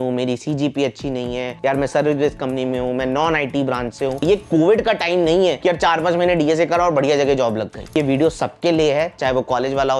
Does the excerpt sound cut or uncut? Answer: cut